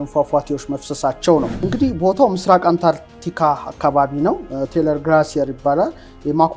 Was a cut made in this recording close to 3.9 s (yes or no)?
no